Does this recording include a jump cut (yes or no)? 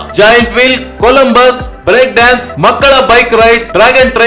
no